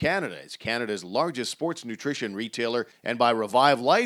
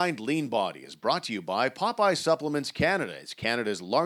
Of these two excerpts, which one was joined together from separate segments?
first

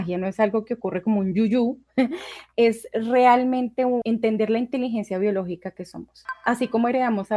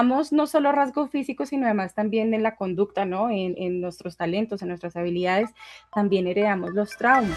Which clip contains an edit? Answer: first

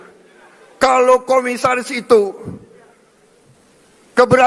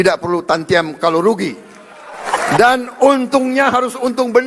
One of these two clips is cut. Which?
second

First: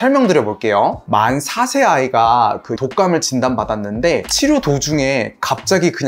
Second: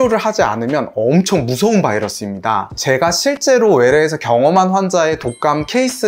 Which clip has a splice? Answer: first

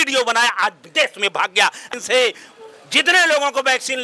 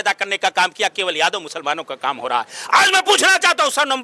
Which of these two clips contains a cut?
first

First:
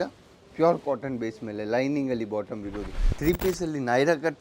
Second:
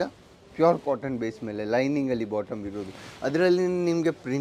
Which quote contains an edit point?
first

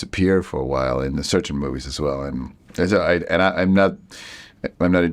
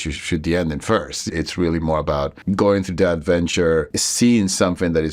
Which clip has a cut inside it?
second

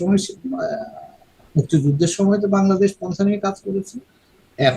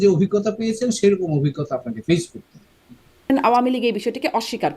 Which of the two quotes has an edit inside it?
second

